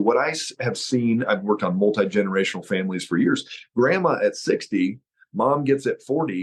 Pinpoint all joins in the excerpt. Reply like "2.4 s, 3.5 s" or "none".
none

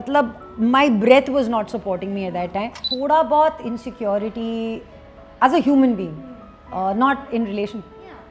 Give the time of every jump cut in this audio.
2.8 s

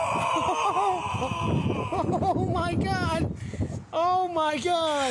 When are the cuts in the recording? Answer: none

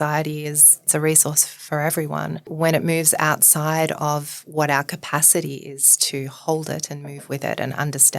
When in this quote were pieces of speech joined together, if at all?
0.9 s, 2.5 s

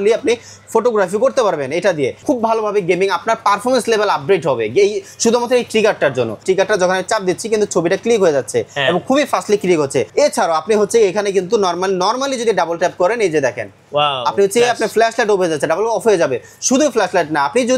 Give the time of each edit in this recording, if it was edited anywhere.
2.2 s, 6.4 s, 10.1 s

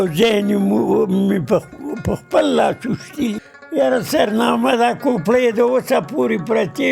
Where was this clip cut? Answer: 3.4 s

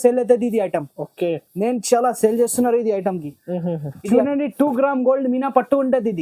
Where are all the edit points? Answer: 3.9 s

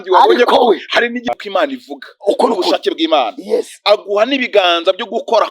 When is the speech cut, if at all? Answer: 1.3 s

